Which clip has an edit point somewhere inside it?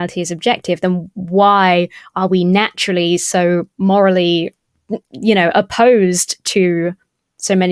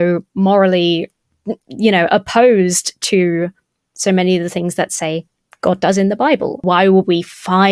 second; 1 cut; at 6.6 s

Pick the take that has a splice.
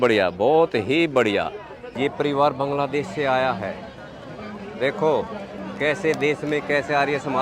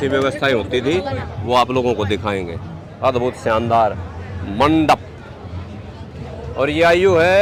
first; 1 cut; at 1.9 s

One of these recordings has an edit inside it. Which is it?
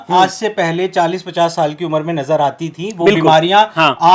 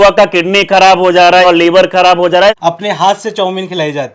second; 2 cuts; at 1.4 s, 2.6 s

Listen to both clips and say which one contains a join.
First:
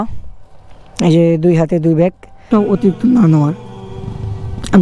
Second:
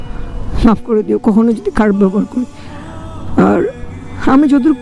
first; 1 cut; at 2.5 s

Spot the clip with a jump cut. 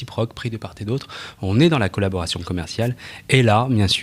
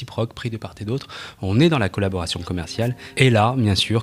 second; 1 cut; at 3.0 s

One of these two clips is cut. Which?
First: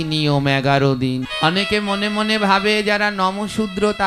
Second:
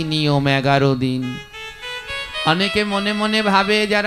first; 1 cut; at 1.3 s

